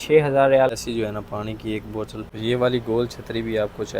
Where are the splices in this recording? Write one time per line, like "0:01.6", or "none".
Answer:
0:00.8
0:02.2